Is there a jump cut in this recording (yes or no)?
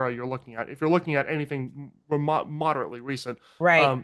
no